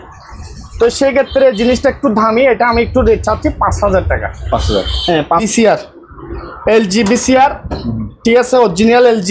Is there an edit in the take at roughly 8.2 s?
no; 1 cut; at 5.5 s

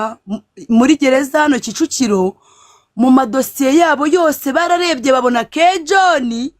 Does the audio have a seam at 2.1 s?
no; 0 cuts

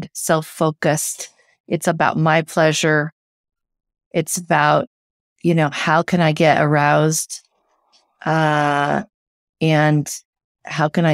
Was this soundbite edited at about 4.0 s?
no; 0 cuts

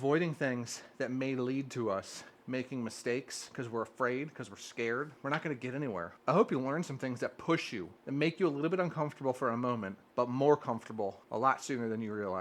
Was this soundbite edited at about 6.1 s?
yes; 5 cuts; at 5.1 s, 6.1 s, 7.9 s, 10.0 s, 11.2 s

